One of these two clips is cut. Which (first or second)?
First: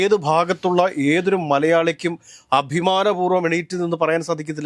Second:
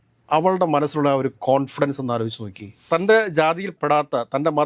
second